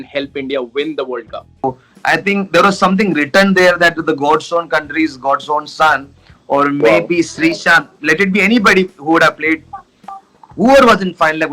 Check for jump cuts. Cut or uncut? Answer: cut